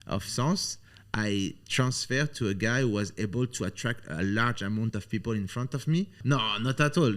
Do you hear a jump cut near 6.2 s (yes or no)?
yes